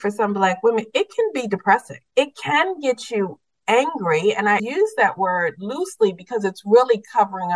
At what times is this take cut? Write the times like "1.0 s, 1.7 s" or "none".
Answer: 2.0 s, 4.6 s